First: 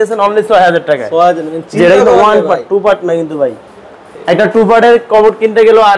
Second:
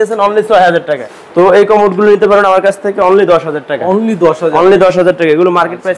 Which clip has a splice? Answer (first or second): second